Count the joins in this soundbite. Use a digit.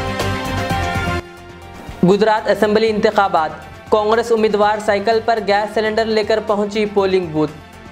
1